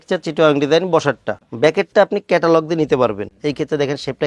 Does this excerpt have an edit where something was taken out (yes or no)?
yes